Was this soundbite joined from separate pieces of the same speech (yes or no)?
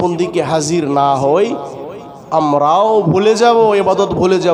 no